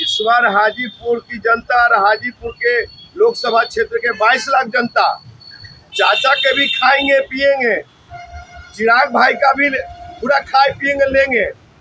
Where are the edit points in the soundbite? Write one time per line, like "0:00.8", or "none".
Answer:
none